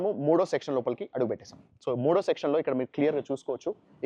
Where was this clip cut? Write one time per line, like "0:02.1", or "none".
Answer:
none